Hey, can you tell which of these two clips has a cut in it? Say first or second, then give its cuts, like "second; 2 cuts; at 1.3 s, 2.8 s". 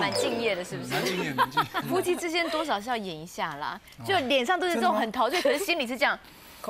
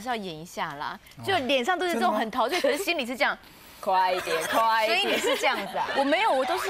first; 1 cut; at 1.8 s